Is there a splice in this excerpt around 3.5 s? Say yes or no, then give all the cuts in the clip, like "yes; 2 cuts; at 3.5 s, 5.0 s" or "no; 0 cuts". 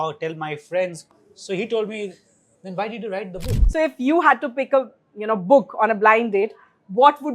yes; 2 cuts; at 1.0 s, 3.5 s